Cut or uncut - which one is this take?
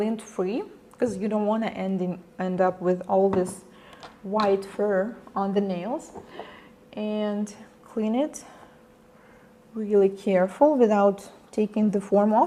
uncut